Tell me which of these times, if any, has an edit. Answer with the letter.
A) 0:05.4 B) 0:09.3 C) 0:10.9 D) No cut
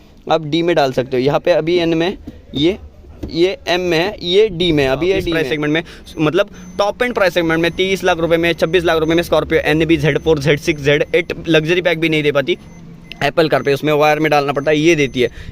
A